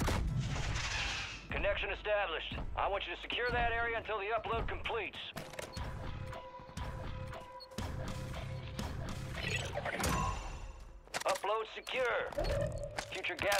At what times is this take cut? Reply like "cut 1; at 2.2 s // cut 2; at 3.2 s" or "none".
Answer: cut 1; at 5.4 s